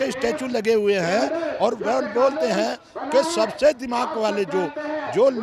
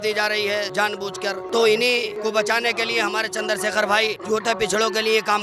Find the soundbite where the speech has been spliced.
second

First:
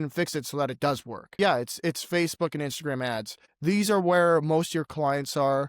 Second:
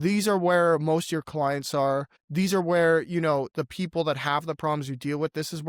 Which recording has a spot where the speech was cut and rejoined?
first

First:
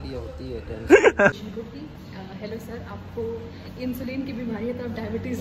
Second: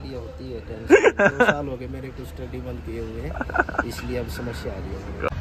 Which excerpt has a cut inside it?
first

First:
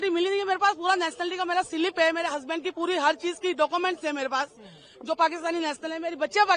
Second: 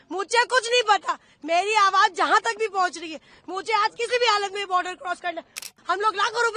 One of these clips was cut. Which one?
second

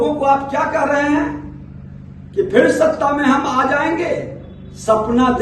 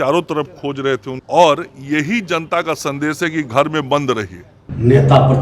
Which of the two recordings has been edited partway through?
second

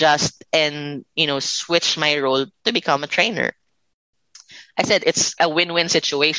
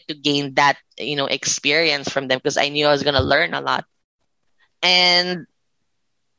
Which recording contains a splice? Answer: first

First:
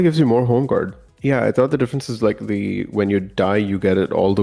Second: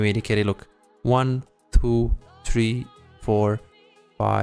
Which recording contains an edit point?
first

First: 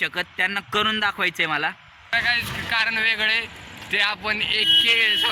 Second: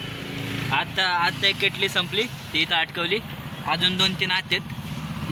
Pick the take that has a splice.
first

